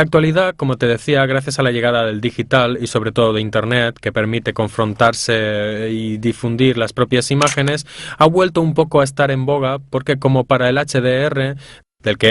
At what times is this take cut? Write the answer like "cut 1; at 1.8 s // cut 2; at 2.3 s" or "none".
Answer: cut 1; at 4.9 s